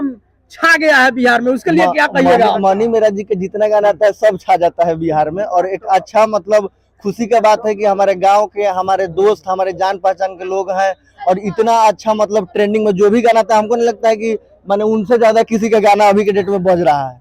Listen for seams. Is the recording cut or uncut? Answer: uncut